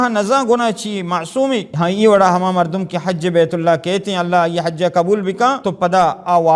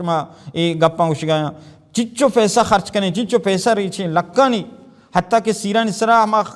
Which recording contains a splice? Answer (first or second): first